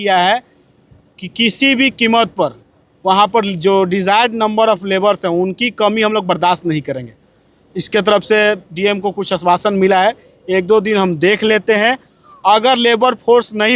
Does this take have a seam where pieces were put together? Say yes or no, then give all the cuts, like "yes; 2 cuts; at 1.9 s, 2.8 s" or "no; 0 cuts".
no; 0 cuts